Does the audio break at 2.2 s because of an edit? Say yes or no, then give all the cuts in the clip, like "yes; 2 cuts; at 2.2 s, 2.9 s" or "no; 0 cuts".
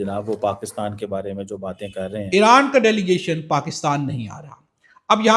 yes; 1 cut; at 2.2 s